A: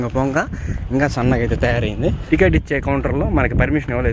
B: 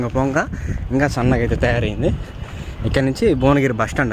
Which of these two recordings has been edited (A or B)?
A